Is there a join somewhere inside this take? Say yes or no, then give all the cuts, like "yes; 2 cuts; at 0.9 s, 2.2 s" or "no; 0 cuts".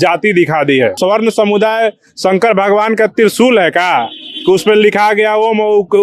yes; 1 cut; at 1.0 s